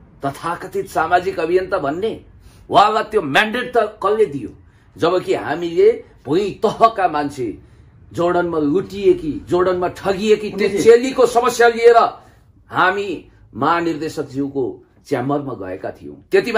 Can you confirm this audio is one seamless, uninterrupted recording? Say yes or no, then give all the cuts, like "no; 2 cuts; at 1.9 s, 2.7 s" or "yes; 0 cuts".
yes; 0 cuts